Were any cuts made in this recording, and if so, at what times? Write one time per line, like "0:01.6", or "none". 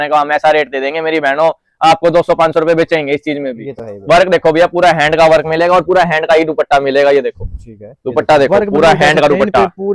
none